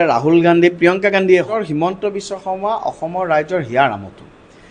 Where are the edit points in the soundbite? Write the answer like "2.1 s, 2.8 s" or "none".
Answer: 1.6 s